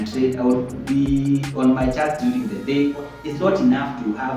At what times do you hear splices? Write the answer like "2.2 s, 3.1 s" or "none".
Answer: 3.2 s